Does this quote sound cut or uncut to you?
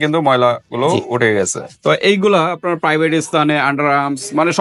cut